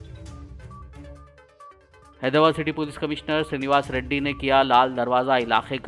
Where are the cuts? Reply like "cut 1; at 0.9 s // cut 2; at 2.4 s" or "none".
cut 1; at 1.1 s

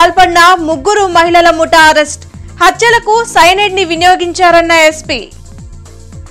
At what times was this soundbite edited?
none

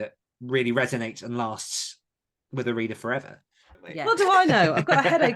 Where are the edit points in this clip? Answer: cut 1; at 3.9 s

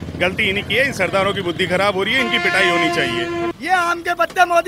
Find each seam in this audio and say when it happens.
cut 1; at 3.5 s

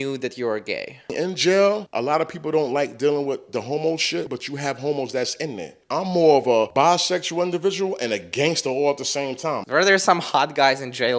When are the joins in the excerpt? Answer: cut 1; at 1.1 s // cut 2; at 1.9 s // cut 3; at 4.3 s // cut 4; at 5.7 s // cut 5; at 6.7 s // cut 6; at 9.6 s

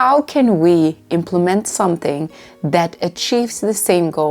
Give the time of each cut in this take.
none

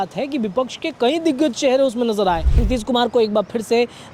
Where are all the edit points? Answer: cut 1; at 2.5 s

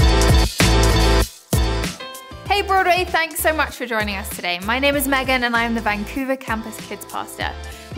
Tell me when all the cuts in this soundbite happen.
cut 1; at 1.4 s

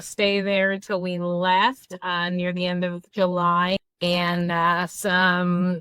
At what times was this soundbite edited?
cut 1; at 3.8 s

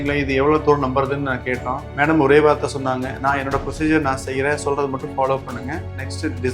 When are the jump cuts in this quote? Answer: cut 1; at 1.8 s

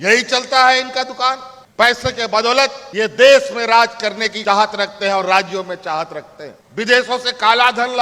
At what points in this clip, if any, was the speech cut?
cut 1; at 2.8 s // cut 2; at 4.3 s // cut 3; at 6.6 s

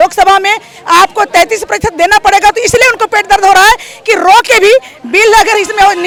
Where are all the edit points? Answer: none

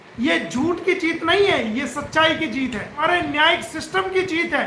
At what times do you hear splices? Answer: cut 1; at 3.0 s

